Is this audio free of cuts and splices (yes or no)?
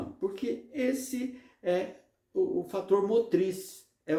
yes